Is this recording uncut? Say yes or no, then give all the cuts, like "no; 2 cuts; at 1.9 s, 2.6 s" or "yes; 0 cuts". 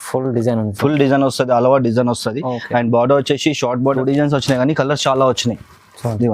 no; 1 cut; at 3.9 s